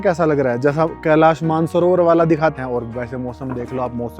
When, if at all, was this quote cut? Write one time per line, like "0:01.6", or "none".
0:02.5

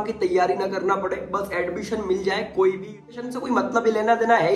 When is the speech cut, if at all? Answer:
0:03.3

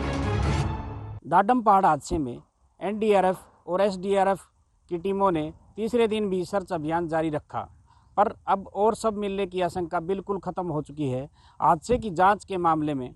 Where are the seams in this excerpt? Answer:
0:01.0

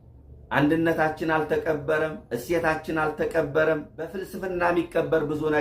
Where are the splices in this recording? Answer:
0:04.3

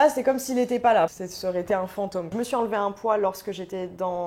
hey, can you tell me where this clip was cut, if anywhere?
0:01.2
0:02.3

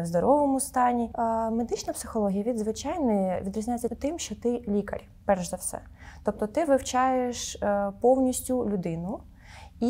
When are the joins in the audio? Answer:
0:01.1
0:03.9

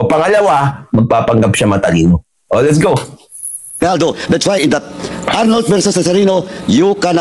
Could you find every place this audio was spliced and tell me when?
none

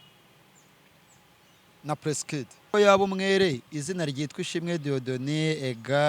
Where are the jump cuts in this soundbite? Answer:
0:02.7

